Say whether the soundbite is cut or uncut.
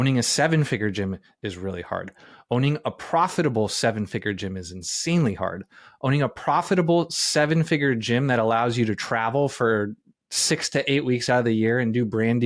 uncut